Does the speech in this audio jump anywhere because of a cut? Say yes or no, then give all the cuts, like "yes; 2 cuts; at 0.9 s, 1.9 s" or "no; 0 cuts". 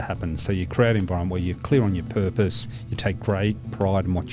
no; 0 cuts